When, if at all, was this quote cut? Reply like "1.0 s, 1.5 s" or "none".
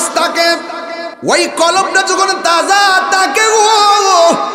1.0 s